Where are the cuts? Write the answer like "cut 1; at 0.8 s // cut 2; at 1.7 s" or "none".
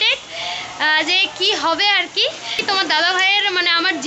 cut 1; at 2.6 s